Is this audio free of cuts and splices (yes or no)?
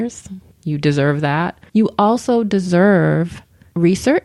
no